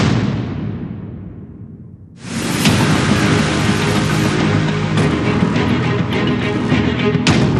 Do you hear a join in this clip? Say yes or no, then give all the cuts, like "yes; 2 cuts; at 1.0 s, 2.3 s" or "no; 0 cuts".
no; 0 cuts